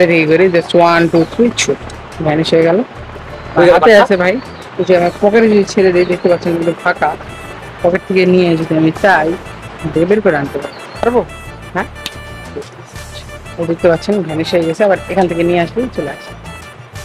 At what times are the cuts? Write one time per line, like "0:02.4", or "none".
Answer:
0:11.0